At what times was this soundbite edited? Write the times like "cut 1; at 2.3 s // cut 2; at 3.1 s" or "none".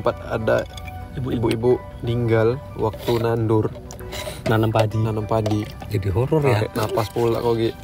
cut 1; at 5.8 s